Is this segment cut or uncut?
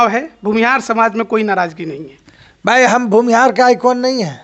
uncut